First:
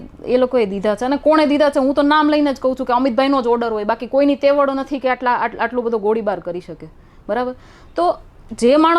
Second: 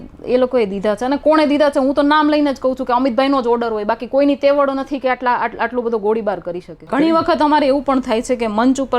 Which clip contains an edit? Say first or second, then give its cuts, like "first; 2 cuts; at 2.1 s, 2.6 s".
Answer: second; 1 cut; at 6.9 s